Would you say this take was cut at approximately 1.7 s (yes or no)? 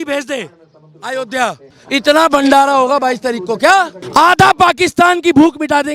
yes